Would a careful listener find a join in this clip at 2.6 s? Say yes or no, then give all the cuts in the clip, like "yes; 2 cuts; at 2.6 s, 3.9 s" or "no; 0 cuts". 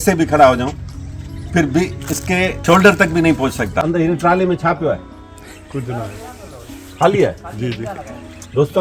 yes; 2 cuts; at 2.6 s, 3.8 s